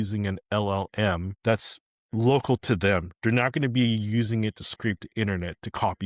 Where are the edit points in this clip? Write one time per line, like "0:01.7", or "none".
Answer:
0:01.3